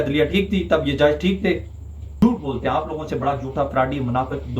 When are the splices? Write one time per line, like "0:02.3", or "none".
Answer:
0:02.1